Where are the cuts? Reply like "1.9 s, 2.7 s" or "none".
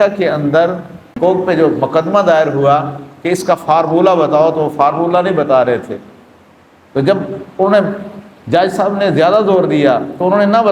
1.1 s